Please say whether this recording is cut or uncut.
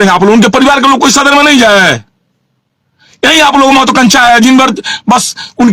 uncut